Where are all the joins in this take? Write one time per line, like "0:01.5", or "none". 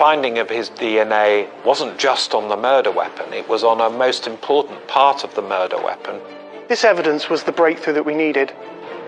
none

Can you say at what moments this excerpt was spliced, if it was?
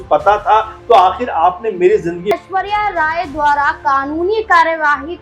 0:02.3

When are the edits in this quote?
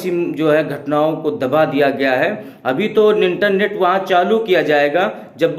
none

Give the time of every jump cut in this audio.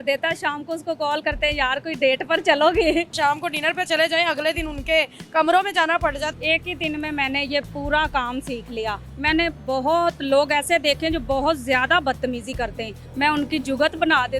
0:03.1
0:06.4
0:09.1
0:13.0

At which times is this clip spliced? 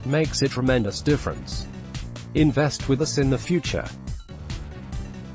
0:03.9

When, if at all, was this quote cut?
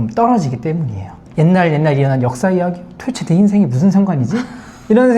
0:01.2

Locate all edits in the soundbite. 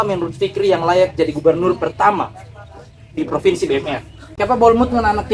0:04.3

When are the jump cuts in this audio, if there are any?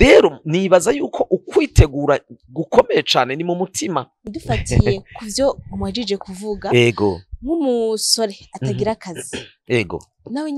0:04.3

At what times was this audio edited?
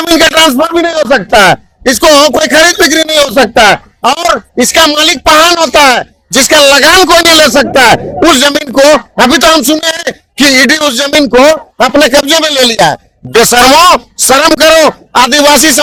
none

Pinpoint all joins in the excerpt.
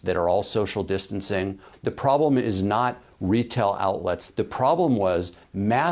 0:01.6
0:04.2

